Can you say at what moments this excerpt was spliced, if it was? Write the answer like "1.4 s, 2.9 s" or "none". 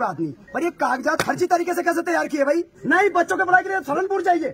2.7 s